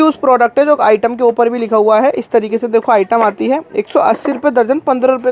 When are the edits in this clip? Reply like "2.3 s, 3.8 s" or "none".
none